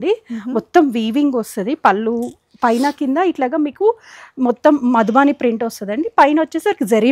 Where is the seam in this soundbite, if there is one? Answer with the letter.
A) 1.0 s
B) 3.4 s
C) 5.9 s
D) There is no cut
D